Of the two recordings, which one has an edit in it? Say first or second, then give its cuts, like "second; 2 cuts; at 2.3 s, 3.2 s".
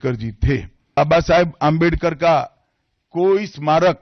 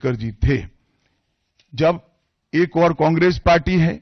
first; 1 cut; at 1.0 s